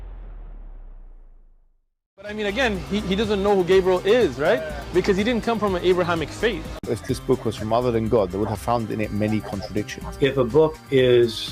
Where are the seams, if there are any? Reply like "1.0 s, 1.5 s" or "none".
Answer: 6.7 s